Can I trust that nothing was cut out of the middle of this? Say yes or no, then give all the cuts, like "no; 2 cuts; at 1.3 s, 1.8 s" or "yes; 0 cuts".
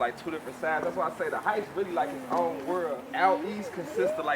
no; 1 cut; at 3.0 s